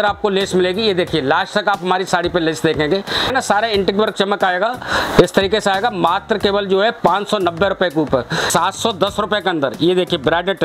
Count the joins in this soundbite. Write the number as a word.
two